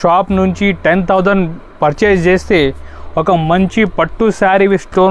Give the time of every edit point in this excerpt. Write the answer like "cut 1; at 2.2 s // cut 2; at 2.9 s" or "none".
none